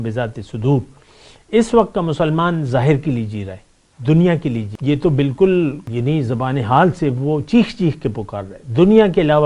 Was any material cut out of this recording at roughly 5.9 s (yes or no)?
yes